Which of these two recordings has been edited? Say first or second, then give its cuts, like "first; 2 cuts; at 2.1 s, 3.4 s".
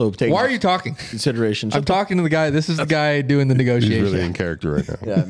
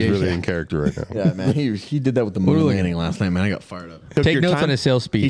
second; 1 cut; at 4.0 s